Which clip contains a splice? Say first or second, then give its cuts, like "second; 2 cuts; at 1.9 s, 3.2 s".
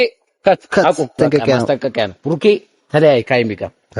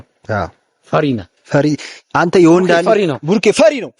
first; 1 cut; at 1.1 s